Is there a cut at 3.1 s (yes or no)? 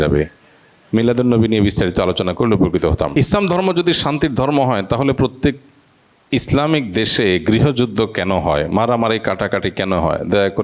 yes